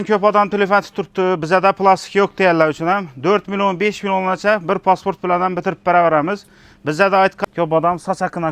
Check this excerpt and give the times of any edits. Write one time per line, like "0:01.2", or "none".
0:07.4